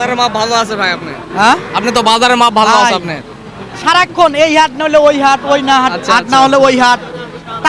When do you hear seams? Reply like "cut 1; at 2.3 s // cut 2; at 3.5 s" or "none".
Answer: none